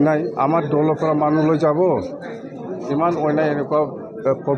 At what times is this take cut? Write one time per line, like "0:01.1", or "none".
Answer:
none